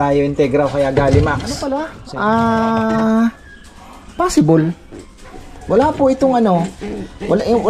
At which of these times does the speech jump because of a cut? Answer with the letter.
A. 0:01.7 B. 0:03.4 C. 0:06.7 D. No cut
A